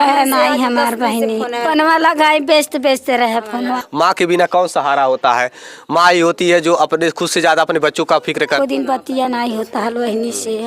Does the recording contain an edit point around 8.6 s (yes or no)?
yes